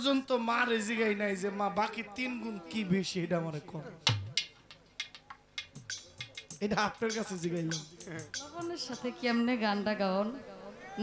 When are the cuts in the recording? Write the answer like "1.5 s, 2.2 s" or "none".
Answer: 8.7 s